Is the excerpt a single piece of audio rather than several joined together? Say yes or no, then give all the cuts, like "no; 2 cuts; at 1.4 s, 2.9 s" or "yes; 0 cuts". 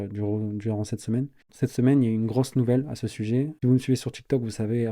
no; 1 cut; at 1.4 s